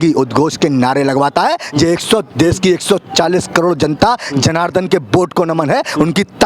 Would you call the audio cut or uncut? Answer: uncut